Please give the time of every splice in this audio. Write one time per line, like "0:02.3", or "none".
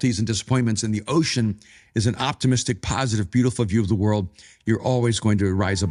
none